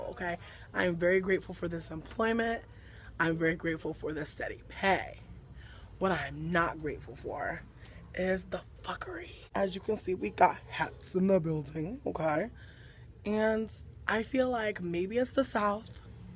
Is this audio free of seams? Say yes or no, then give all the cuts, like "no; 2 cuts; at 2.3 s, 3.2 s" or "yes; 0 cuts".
no; 1 cut; at 4.7 s